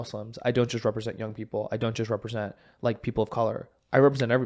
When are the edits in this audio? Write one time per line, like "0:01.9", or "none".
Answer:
none